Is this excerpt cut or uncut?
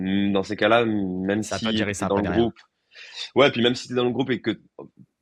uncut